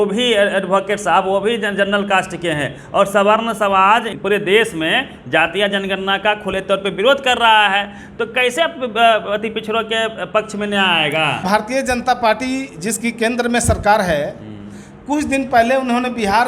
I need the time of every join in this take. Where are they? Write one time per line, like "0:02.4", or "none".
0:04.1
0:11.4